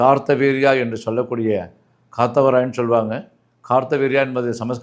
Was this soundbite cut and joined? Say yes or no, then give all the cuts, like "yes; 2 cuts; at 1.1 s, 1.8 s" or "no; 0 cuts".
no; 0 cuts